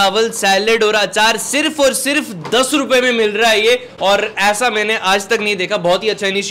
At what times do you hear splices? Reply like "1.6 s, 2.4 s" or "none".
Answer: none

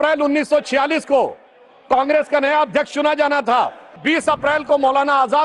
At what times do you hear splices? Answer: 4.0 s

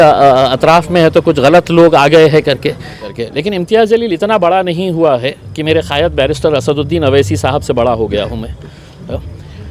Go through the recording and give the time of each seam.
3.1 s

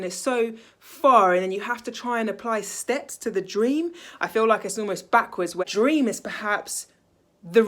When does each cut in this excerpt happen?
5.6 s

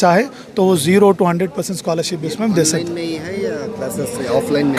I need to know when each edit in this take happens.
none

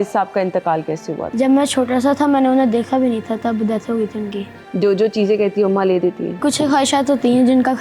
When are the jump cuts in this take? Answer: 1.2 s, 4.5 s, 6.4 s

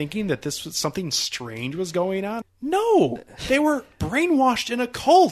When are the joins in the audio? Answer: 2.4 s

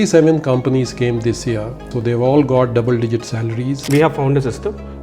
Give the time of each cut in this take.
1.9 s, 3.8 s

